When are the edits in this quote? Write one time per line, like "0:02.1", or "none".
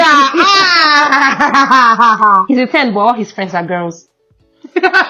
0:02.4